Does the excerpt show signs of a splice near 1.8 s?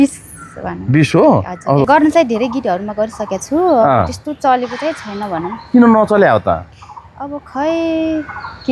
yes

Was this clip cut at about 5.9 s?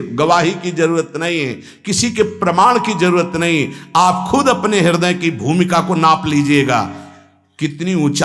no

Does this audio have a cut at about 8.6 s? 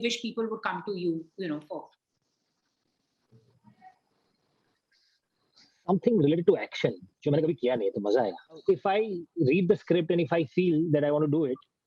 yes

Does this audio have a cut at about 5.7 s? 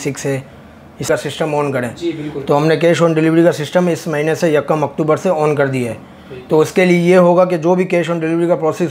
no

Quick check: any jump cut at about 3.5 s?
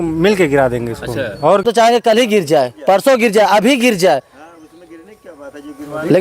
no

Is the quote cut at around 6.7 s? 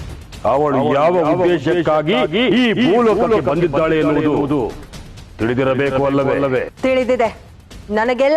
yes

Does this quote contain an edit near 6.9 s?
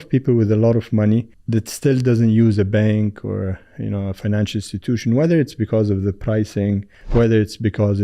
yes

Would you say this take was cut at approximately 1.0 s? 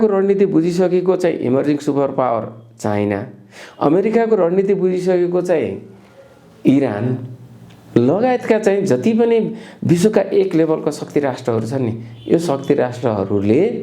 no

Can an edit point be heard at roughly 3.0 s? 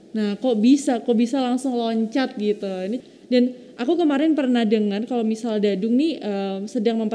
yes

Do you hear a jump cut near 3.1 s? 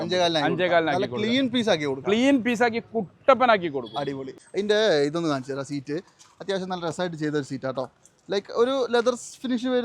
no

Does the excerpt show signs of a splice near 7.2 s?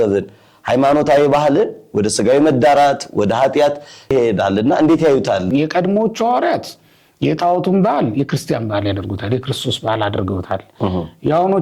no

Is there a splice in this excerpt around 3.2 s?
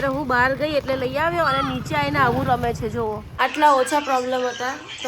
yes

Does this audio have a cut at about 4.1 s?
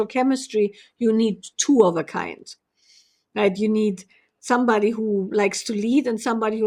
no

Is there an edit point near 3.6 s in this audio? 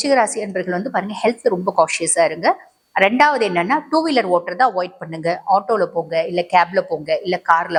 no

